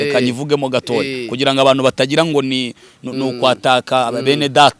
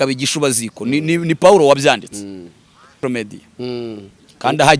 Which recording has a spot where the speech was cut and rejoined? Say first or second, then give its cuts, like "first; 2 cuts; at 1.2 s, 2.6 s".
second; 1 cut; at 2.9 s